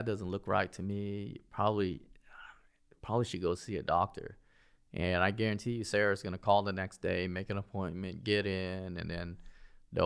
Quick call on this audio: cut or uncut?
uncut